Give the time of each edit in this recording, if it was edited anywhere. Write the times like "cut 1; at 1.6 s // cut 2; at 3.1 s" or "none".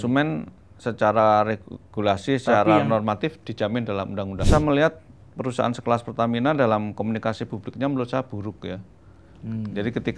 cut 1; at 4.5 s